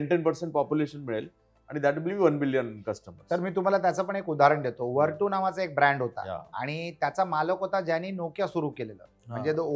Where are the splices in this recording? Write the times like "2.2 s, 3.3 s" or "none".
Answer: none